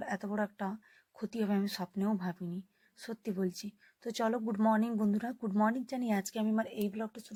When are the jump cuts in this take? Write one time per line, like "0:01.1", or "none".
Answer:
none